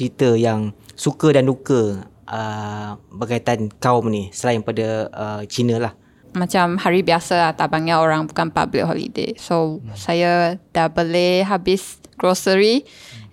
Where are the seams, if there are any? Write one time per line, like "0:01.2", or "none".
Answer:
0:06.2